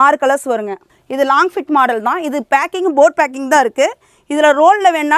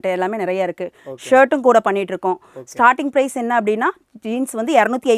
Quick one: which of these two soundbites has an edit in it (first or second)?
first